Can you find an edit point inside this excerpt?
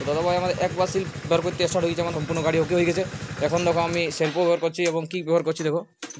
yes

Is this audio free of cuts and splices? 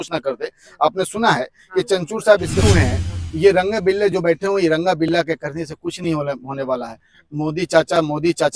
no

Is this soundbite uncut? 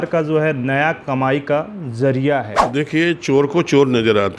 no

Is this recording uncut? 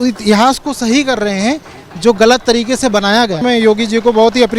no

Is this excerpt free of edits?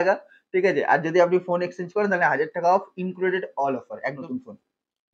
yes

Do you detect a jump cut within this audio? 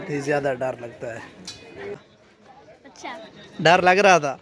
yes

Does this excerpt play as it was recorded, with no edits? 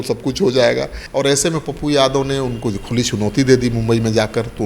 no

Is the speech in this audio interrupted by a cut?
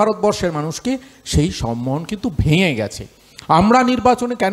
no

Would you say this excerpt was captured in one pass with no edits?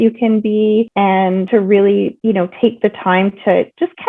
no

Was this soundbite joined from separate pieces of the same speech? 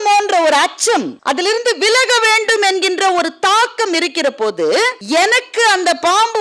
yes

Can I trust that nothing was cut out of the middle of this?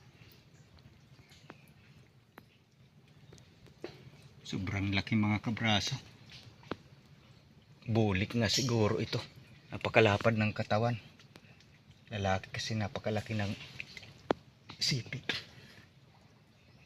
no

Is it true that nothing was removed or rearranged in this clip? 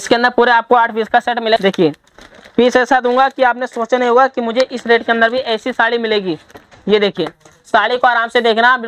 no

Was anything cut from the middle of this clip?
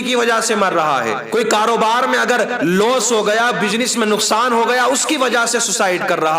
yes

